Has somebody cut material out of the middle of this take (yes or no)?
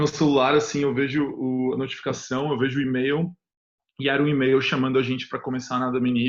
no